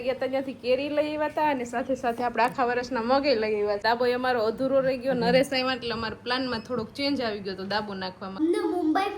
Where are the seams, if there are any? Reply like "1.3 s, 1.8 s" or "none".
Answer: 3.8 s, 8.2 s